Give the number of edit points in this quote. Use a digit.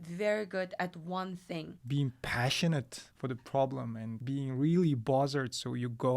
1